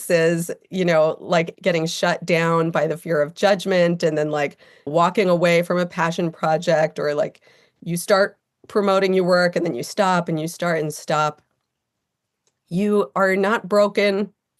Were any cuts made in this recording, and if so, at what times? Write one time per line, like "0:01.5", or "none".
0:01.5
0:04.9